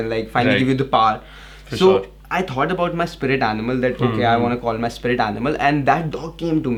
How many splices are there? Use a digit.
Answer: 0